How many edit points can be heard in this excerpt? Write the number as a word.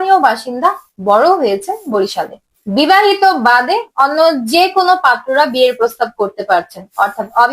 one